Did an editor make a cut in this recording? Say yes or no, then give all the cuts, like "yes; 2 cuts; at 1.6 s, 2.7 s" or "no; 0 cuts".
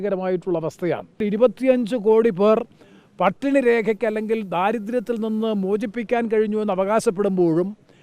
yes; 1 cut; at 1.2 s